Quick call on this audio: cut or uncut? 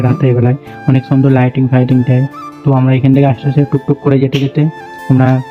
uncut